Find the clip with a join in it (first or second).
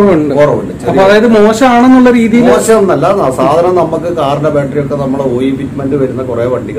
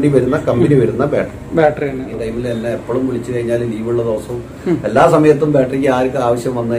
second